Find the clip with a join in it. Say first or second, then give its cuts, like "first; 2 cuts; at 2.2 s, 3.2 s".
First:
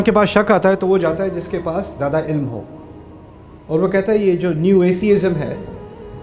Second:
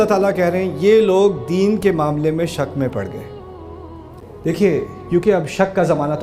second; 1 cut; at 4.1 s